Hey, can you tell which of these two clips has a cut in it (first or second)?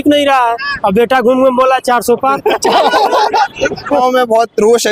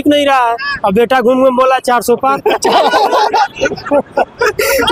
first